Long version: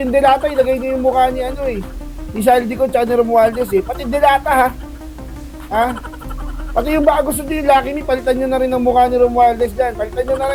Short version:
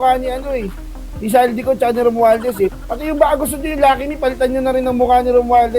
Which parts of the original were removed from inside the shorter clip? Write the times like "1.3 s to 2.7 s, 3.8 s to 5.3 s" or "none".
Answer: 4.0 s to 6.7 s